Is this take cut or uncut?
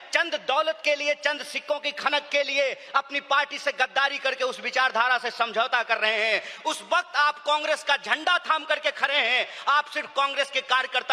uncut